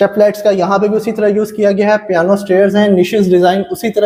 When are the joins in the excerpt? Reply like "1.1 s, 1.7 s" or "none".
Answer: none